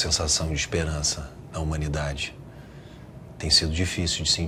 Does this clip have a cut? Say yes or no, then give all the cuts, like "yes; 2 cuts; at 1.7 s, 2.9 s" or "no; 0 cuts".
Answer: no; 0 cuts